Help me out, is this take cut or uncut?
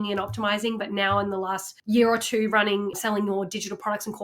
cut